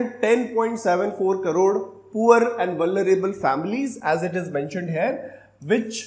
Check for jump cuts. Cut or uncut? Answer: uncut